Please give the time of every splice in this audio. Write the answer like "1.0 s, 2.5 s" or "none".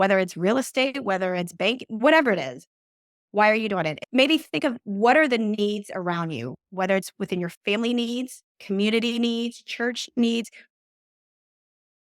4.0 s